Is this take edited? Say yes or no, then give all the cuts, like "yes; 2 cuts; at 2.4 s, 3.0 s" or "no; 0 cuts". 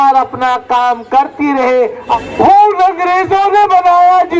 yes; 1 cut; at 2.3 s